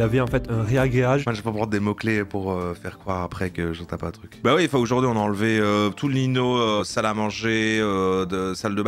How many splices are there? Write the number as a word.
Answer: three